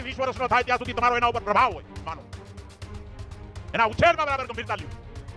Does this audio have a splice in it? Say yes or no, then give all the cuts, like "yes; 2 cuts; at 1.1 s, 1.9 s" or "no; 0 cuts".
no; 0 cuts